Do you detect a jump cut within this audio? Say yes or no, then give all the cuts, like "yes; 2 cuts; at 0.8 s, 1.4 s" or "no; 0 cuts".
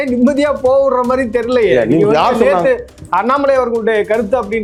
no; 0 cuts